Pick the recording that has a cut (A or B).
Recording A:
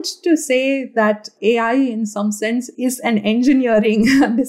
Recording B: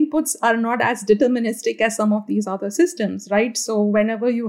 A